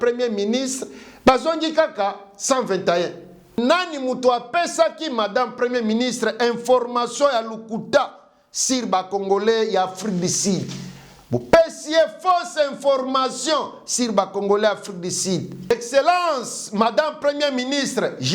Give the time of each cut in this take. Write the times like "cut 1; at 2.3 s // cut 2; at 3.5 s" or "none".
cut 1; at 3.6 s // cut 2; at 15.7 s